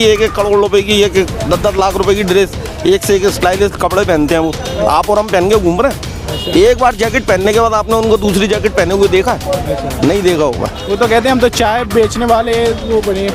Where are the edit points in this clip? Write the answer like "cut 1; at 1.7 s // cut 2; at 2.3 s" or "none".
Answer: none